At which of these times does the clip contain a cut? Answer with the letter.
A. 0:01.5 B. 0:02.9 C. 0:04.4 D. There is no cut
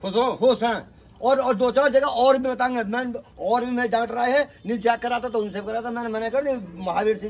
D